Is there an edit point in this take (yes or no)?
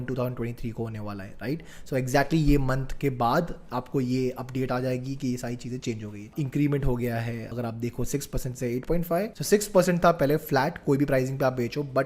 yes